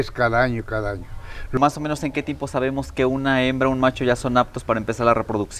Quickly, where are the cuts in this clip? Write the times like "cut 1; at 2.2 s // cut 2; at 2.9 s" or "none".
cut 1; at 1.6 s